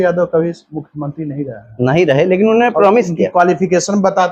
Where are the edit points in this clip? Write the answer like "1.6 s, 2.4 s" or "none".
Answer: none